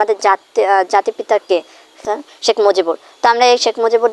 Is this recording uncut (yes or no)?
no